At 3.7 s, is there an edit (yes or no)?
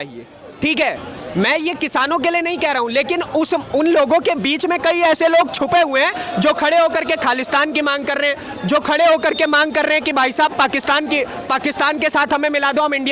no